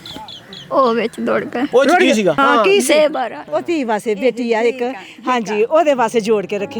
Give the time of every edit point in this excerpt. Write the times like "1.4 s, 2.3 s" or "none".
1.7 s, 2.4 s